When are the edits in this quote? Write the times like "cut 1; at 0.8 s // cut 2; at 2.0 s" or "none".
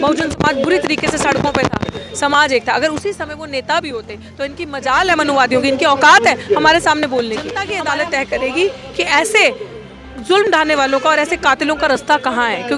cut 1; at 7.7 s